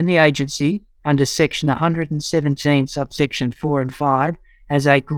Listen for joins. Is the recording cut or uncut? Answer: uncut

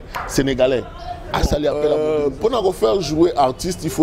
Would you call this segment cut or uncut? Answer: cut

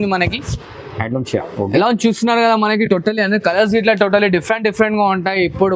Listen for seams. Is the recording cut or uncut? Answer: uncut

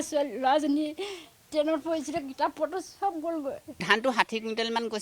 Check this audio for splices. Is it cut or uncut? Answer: cut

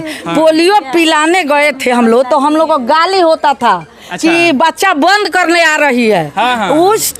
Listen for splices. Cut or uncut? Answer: uncut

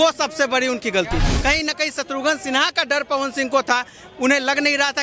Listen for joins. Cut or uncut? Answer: cut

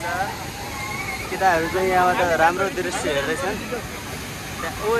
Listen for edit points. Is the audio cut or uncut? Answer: uncut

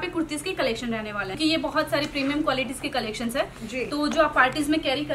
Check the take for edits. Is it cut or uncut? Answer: cut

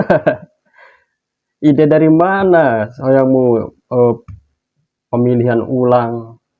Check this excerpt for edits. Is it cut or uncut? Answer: uncut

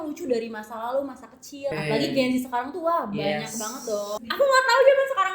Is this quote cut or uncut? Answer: cut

